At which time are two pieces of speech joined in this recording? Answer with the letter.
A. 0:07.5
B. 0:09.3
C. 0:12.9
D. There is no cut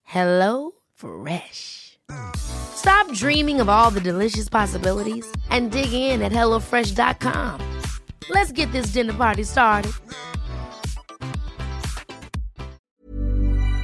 C